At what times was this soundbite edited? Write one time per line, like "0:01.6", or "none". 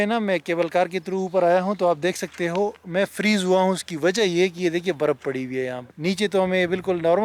0:05.9